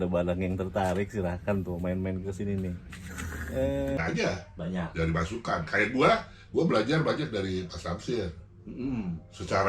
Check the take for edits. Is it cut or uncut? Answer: cut